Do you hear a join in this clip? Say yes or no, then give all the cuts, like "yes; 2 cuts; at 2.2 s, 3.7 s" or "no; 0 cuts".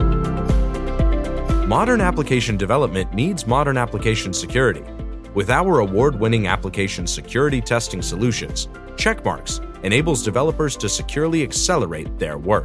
no; 0 cuts